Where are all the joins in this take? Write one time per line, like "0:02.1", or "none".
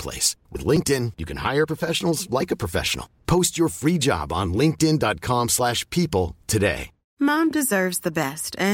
0:07.0